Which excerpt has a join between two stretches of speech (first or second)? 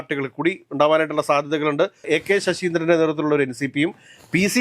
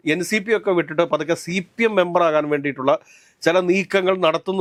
first